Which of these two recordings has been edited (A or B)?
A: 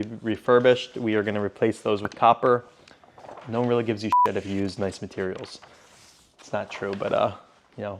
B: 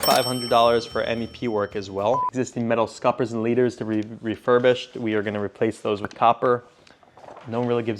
B